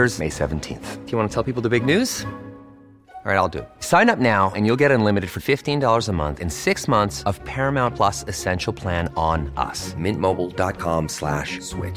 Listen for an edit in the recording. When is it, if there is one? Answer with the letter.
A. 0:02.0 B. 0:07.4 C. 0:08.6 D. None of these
D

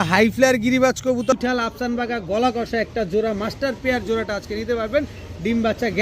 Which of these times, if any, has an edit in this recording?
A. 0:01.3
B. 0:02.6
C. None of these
A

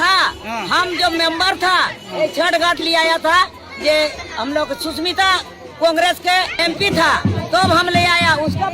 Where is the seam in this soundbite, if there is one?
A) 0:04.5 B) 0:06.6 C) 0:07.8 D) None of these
B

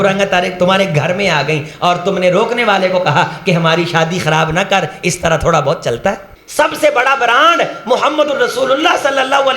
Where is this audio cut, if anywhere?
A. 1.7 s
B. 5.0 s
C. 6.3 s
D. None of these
C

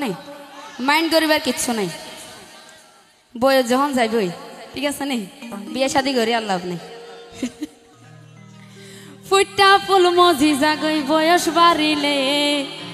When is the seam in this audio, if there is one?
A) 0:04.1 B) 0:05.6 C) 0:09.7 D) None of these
D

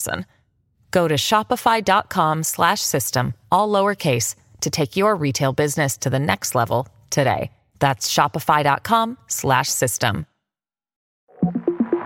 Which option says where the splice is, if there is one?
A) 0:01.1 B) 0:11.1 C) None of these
B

